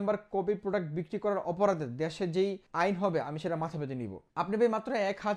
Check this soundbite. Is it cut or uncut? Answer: cut